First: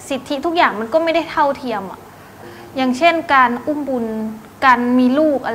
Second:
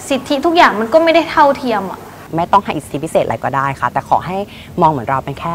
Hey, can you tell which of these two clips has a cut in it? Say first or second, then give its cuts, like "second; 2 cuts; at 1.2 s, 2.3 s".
second; 1 cut; at 2.2 s